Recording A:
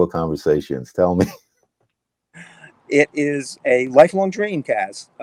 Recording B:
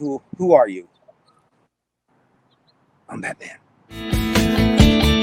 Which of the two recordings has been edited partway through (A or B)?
B